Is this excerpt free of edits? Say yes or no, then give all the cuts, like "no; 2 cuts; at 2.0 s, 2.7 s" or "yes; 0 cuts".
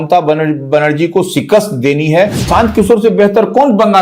no; 1 cut; at 2.4 s